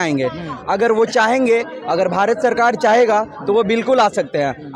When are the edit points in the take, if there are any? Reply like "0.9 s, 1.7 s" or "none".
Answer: none